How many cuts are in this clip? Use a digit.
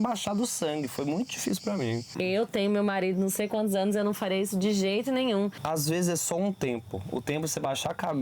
2